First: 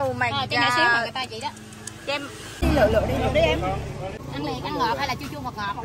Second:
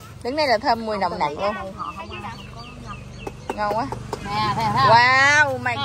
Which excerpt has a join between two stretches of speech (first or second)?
first